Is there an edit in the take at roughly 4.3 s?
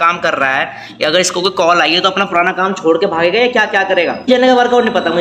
yes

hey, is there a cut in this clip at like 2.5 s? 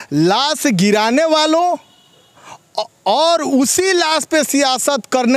no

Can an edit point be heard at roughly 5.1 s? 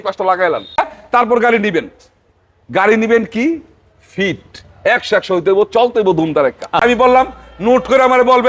no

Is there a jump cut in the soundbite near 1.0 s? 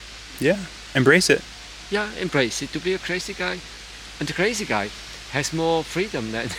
no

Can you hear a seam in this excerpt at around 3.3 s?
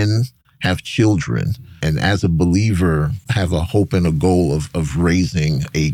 yes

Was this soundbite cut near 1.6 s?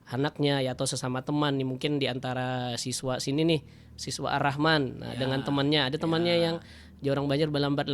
no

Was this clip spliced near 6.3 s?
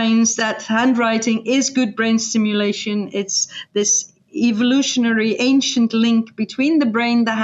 no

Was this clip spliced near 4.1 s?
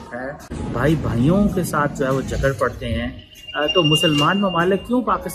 no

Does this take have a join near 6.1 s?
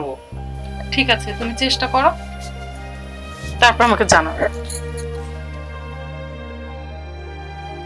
no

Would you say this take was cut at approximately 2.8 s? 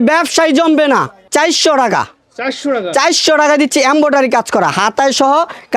no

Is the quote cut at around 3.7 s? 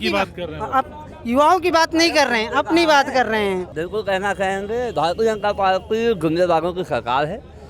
yes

